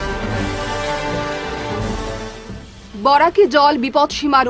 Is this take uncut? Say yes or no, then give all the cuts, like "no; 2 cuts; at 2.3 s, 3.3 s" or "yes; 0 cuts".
yes; 0 cuts